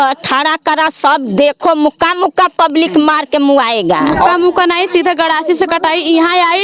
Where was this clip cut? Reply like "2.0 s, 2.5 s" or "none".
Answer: 4.3 s

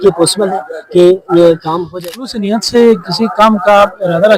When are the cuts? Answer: 1.8 s

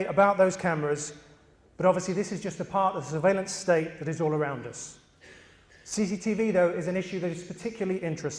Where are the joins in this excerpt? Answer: none

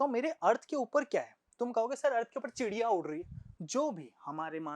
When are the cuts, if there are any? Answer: 3.4 s

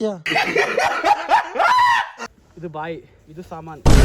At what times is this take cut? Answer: 2.2 s

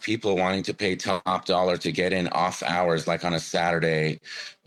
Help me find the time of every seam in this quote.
none

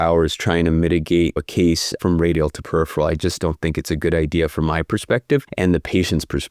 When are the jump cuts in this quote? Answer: 1.4 s, 5.5 s

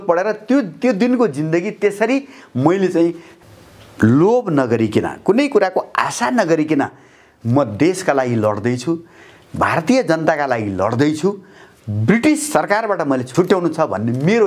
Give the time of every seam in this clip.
13.3 s

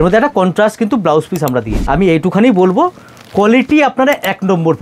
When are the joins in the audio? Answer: 1.8 s

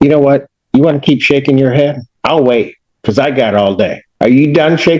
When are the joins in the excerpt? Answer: 2.1 s, 4.0 s

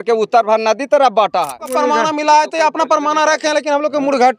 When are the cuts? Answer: 1.7 s

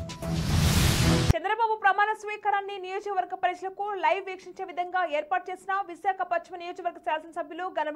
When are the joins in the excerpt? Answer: 1.3 s

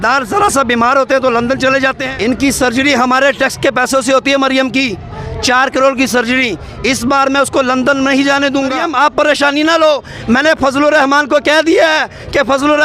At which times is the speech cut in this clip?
2.0 s, 8.8 s

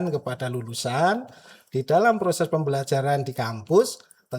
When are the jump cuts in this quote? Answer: none

